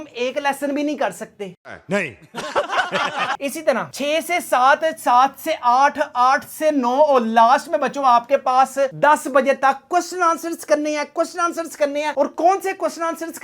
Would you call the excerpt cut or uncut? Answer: uncut